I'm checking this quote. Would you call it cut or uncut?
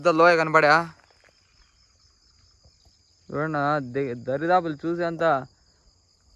uncut